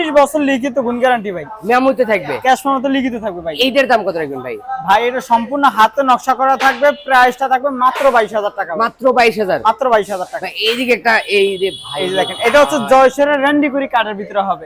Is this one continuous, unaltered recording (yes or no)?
yes